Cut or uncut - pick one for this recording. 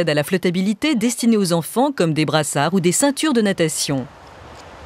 uncut